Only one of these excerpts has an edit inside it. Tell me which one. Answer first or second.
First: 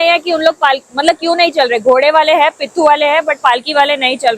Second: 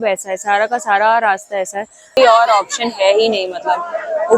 second